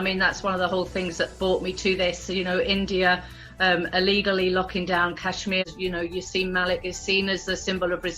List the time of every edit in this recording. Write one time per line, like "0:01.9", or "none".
0:05.6